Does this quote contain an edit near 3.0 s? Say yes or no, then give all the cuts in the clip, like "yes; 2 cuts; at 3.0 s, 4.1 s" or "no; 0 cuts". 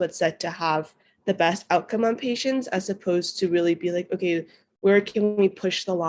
no; 0 cuts